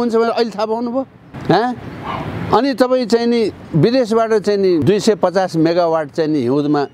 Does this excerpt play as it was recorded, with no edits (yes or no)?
no